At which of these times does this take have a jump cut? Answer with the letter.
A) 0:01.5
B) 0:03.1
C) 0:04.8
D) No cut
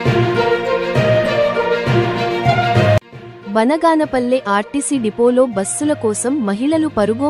B